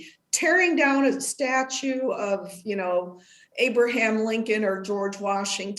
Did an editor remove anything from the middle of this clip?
no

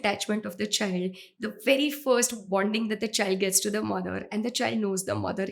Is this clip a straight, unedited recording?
yes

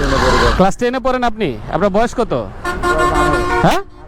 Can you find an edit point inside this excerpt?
no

